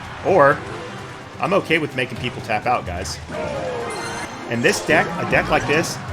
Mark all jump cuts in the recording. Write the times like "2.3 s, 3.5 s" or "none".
4.3 s